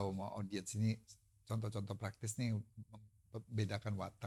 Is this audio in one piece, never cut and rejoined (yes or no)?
yes